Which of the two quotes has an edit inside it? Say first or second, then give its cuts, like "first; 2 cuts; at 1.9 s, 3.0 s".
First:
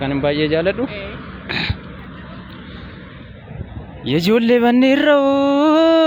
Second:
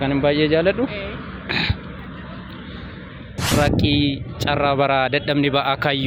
second; 1 cut; at 3.5 s